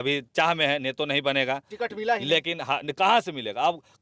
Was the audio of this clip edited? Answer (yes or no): no